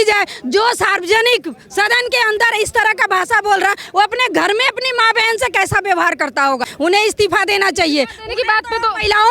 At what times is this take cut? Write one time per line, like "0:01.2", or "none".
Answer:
0:06.7